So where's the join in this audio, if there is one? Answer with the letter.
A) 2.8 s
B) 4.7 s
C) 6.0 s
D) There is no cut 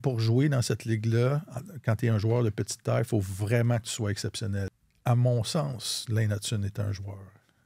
B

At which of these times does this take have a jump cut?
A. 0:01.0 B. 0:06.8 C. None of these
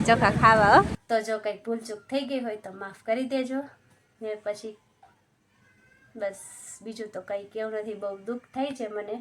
A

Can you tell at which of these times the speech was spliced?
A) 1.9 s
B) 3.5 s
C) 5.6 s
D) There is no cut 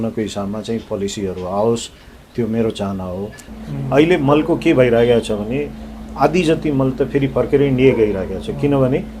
B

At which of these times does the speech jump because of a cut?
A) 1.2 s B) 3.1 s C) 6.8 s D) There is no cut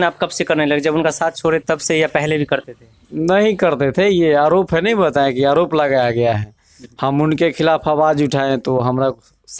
D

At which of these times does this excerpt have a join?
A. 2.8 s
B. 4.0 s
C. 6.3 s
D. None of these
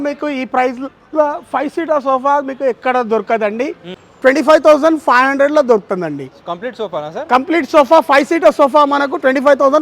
B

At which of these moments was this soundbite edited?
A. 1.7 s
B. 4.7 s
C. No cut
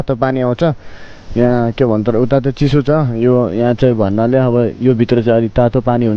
C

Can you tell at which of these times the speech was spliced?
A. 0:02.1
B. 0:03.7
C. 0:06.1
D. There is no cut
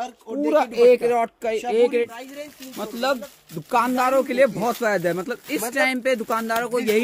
A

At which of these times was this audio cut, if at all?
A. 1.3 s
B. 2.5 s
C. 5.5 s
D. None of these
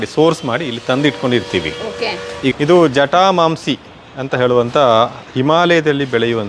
B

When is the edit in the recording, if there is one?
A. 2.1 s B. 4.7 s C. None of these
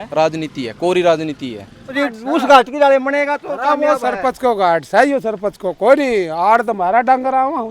A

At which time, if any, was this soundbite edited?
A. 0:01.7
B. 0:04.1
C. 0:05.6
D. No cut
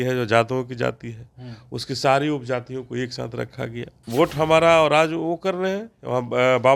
B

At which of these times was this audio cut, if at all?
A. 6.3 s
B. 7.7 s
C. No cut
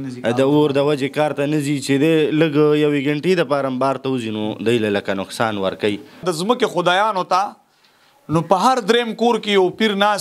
A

